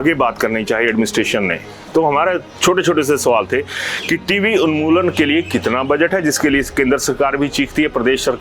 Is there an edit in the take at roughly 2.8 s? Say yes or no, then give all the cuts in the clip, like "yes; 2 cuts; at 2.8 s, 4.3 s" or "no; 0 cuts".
no; 0 cuts